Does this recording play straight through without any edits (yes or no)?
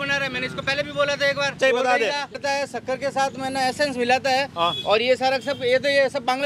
no